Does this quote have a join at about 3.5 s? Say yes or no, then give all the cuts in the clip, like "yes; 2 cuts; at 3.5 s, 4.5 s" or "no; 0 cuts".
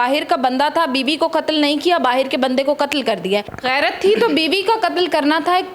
yes; 1 cut; at 3.5 s